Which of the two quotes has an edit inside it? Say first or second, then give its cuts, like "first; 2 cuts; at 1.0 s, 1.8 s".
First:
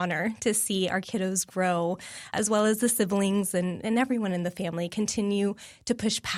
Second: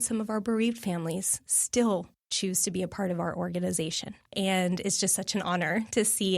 second; 2 cuts; at 2.2 s, 4.3 s